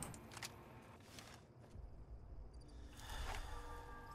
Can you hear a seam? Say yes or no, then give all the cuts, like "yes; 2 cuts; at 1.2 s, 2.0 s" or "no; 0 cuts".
yes; 1 cut; at 1.5 s